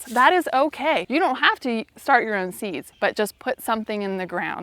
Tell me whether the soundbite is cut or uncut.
cut